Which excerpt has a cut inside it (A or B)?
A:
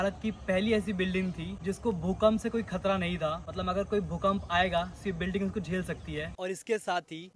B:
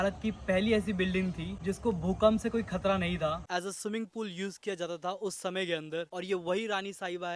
B